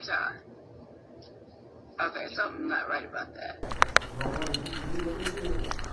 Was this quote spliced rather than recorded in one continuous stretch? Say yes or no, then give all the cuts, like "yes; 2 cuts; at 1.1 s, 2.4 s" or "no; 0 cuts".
no; 0 cuts